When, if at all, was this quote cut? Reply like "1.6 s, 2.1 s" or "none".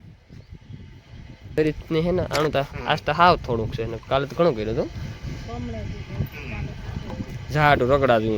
1.6 s